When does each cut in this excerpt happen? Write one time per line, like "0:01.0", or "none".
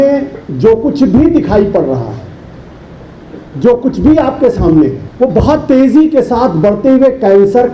0:05.0